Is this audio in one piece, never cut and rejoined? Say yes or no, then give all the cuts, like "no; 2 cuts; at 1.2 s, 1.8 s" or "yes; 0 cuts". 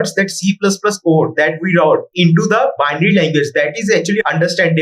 no; 1 cut; at 2.1 s